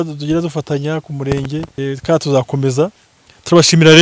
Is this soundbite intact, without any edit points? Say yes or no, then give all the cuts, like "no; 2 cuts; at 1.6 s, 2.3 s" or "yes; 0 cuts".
no; 1 cut; at 1.7 s